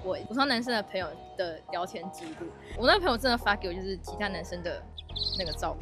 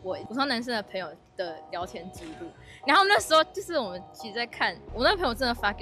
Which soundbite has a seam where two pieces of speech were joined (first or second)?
first